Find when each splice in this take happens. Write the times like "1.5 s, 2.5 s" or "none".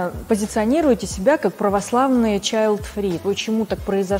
3.2 s